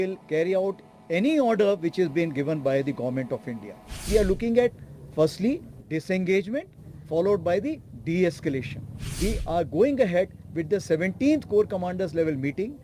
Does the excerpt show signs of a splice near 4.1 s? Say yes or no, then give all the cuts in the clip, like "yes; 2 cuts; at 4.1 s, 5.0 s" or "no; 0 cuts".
yes; 2 cuts; at 4.1 s, 9.0 s